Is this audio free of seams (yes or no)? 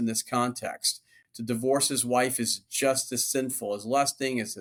yes